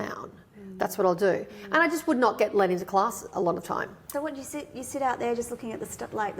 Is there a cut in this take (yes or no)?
yes